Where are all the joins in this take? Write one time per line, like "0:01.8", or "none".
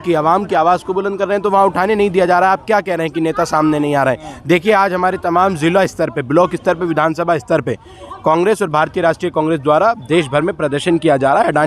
none